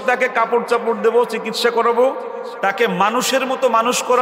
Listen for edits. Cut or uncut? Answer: uncut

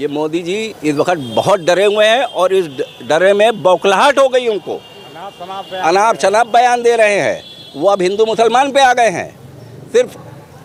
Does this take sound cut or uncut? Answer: uncut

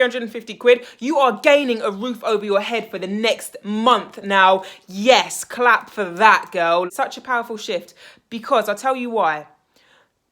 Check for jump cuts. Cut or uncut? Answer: cut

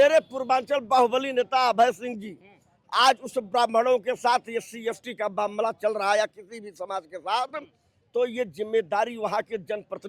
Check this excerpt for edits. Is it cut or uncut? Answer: uncut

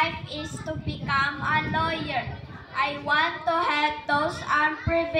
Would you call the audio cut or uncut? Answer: uncut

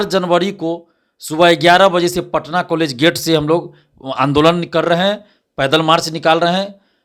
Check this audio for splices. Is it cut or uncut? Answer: uncut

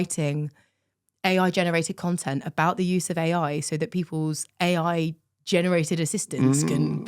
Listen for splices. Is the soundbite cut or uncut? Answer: uncut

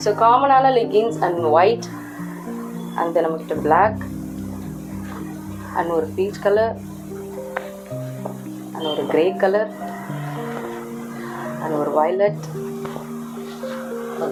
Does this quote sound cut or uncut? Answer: uncut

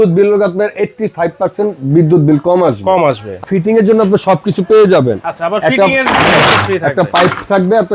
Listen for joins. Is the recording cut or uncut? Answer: cut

